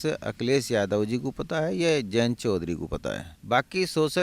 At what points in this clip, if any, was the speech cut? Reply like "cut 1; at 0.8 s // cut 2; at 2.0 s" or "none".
cut 1; at 3.3 s